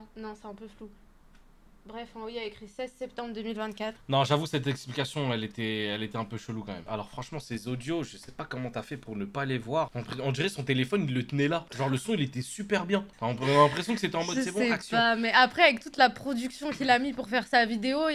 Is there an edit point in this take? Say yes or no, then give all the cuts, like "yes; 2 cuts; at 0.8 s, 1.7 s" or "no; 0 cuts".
no; 0 cuts